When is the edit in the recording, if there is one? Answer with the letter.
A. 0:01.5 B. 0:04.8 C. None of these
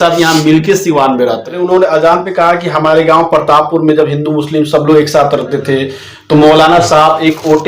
A